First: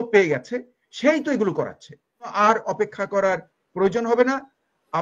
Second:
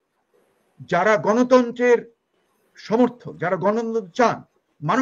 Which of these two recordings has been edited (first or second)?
first